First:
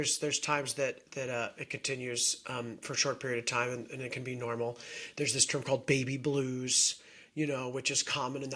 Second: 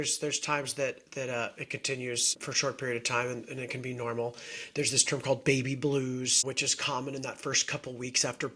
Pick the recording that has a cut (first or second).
second